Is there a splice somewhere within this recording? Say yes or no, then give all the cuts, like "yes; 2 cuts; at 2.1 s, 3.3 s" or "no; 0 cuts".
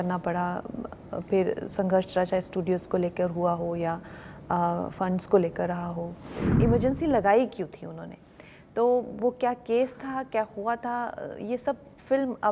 yes; 1 cut; at 6.4 s